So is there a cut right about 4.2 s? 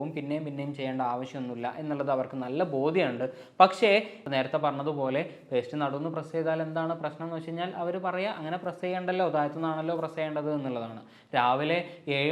yes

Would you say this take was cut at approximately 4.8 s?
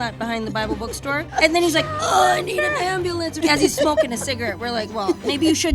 no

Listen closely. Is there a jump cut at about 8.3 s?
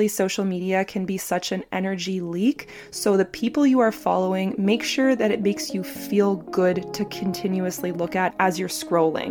yes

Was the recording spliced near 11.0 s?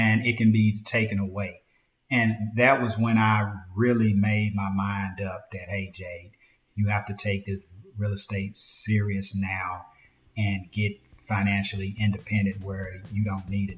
no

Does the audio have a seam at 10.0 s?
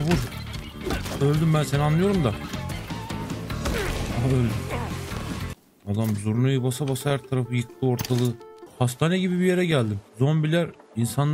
yes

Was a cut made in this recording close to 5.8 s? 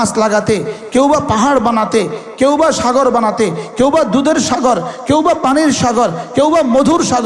no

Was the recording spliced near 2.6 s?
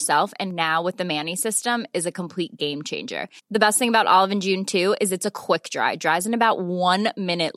no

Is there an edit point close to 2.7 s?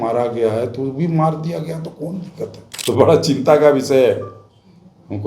yes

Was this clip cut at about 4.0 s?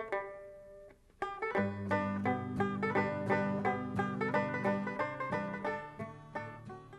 yes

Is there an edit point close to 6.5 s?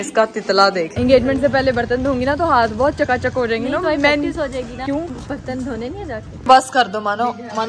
yes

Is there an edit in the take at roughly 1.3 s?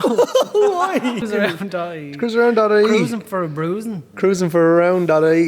yes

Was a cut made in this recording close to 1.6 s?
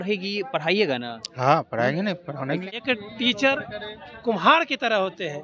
no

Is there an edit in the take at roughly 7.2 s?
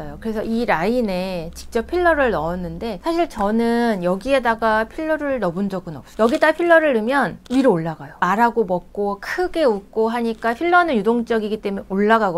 no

